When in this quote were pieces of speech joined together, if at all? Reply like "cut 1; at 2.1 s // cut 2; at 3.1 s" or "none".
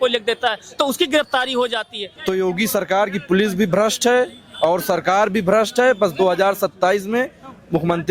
cut 1; at 2.1 s